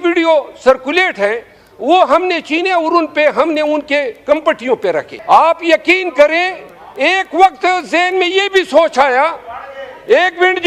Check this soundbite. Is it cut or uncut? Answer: cut